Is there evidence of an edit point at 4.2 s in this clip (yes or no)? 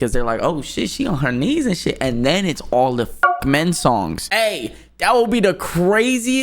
yes